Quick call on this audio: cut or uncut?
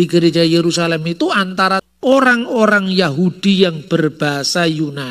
cut